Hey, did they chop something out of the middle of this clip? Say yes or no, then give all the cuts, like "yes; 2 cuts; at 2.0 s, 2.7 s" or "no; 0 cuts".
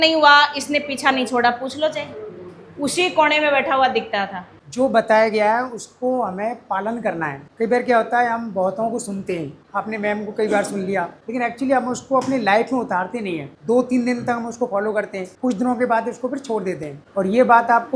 no; 0 cuts